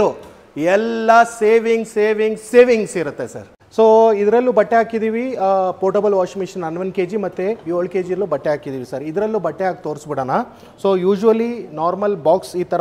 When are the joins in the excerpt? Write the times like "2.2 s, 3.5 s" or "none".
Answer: none